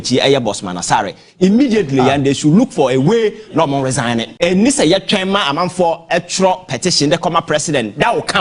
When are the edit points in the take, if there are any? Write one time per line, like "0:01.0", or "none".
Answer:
0:04.3